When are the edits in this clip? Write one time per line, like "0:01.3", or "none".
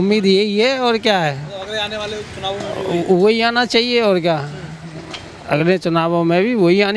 none